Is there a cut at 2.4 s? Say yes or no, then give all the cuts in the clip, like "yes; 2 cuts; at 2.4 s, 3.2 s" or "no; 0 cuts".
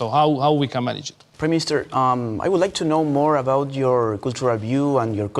no; 1 cut; at 1.2 s